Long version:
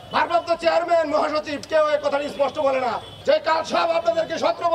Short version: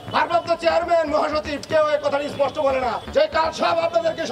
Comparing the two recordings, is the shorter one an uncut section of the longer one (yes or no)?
no